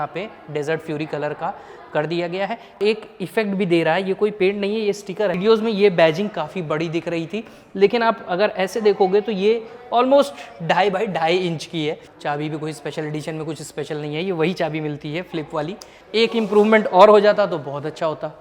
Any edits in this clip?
yes; 4 cuts; at 2.8 s, 5.4 s, 12.1 s, 15.9 s

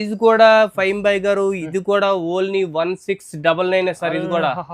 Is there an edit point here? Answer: no; 0 cuts

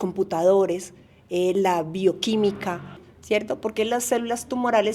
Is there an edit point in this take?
yes; 1 cut; at 3.1 s

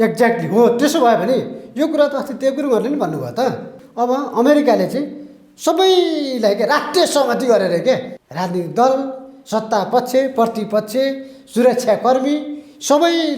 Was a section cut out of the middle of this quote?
yes; 2 cuts; at 3.8 s, 8.2 s

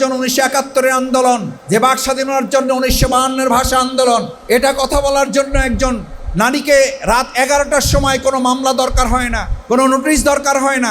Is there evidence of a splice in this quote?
yes; 4 cuts; at 1.5 s, 4.3 s, 6.2 s, 9.5 s

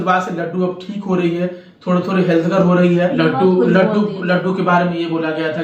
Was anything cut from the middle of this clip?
yes; 1 cut; at 3.1 s

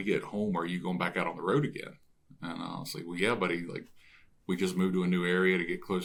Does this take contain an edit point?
no; 0 cuts

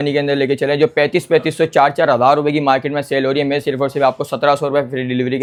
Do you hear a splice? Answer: no; 0 cuts

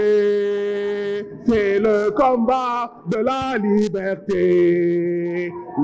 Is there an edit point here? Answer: no; 0 cuts

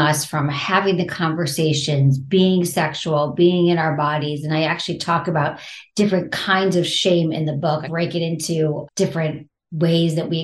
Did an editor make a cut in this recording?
yes; 2 cuts; at 7.9 s, 9.2 s

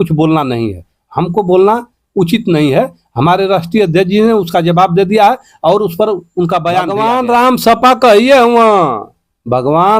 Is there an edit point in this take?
yes; 1 cut; at 6.9 s

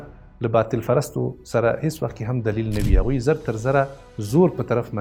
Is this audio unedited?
yes; 0 cuts

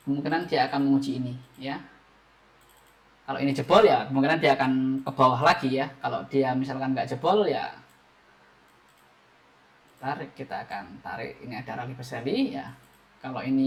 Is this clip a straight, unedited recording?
yes; 0 cuts

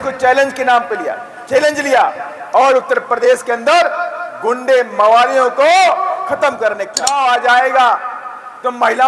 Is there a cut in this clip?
yes; 1 cut; at 7.0 s

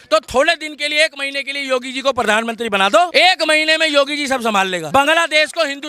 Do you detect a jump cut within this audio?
yes; 2 cuts; at 3.1 s, 4.9 s

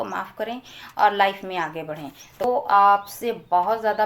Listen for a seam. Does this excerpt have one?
yes; 1 cut; at 2.4 s

